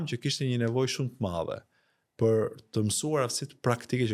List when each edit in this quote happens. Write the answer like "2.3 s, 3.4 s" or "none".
none